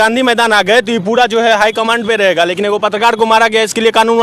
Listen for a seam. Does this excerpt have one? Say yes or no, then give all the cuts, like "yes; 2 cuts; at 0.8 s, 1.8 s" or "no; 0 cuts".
no; 0 cuts